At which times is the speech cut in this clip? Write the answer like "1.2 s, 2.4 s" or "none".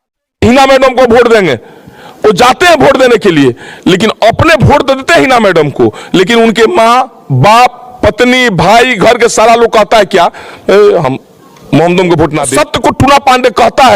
12.5 s